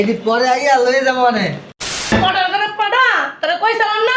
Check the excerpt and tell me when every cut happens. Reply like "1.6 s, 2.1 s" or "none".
2.1 s